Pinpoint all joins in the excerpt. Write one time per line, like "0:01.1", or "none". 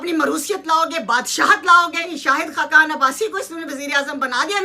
0:02.1